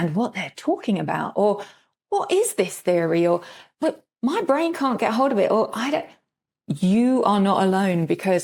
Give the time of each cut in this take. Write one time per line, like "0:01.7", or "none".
none